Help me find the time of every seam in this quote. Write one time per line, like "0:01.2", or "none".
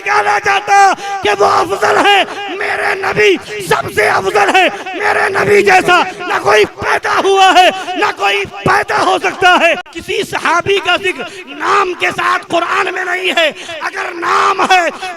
0:09.9